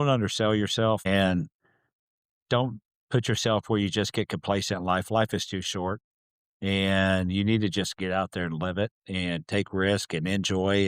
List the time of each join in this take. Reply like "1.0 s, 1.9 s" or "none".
1.1 s